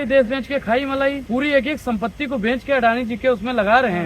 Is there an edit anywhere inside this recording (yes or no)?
yes